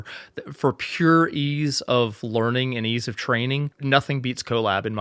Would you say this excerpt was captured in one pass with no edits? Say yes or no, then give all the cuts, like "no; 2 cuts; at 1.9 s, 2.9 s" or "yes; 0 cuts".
no; 1 cut; at 3.7 s